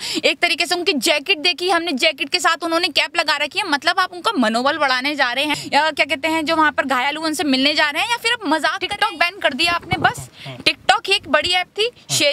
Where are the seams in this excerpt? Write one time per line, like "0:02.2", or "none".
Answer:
0:05.6
0:08.8